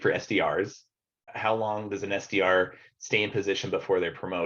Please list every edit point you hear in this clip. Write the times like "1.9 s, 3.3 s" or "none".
1.3 s